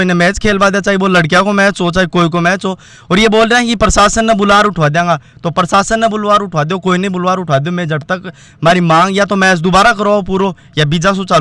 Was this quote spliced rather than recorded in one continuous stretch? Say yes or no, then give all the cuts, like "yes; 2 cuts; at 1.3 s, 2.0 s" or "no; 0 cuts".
no; 0 cuts